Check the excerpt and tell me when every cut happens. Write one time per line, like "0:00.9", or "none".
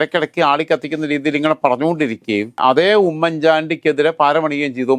0:02.5